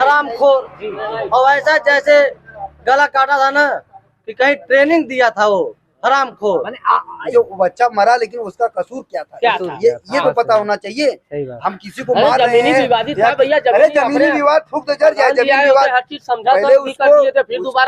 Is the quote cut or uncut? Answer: cut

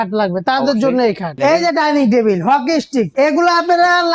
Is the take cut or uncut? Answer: cut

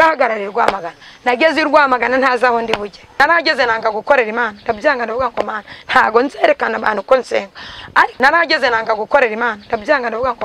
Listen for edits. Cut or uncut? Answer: cut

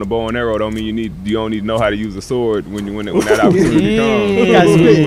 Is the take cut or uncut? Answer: uncut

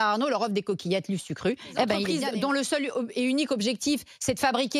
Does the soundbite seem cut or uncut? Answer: cut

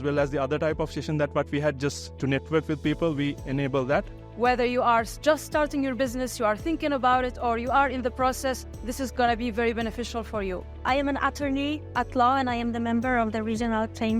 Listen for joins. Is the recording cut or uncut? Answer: cut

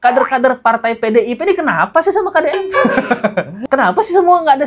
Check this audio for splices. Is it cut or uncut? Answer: uncut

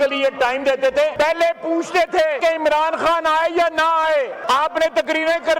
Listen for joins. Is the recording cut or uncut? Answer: cut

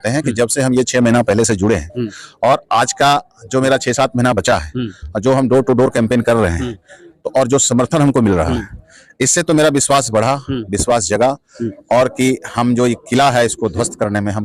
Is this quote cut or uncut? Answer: uncut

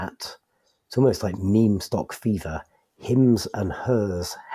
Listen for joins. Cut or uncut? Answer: uncut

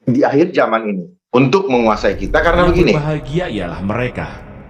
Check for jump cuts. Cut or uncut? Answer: cut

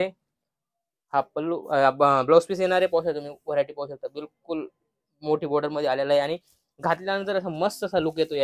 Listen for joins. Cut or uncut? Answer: uncut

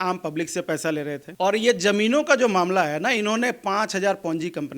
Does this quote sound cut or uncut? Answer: cut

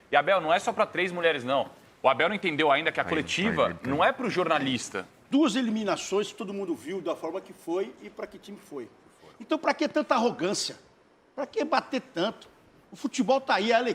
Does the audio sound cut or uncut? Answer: cut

